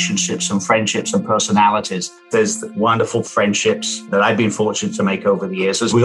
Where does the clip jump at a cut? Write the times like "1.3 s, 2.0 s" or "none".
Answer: 2.3 s, 3.3 s